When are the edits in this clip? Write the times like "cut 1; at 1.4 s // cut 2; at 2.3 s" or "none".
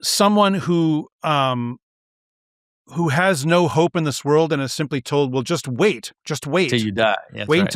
none